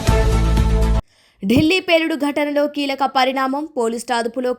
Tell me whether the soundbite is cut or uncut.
cut